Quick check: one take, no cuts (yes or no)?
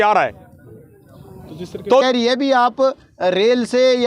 no